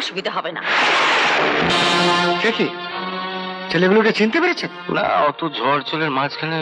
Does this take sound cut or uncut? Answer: cut